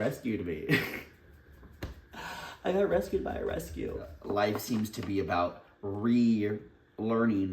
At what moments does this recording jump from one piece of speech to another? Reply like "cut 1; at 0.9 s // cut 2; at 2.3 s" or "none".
cut 1; at 4.2 s